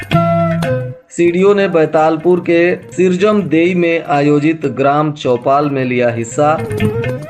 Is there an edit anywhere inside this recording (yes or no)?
yes